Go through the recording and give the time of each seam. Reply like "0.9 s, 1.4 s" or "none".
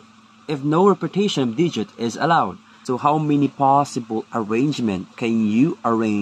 2.7 s